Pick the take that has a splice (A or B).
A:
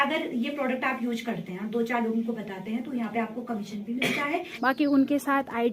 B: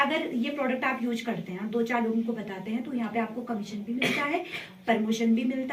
A